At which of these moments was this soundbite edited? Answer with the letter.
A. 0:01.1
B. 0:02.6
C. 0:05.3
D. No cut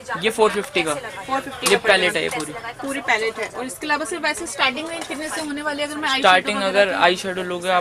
D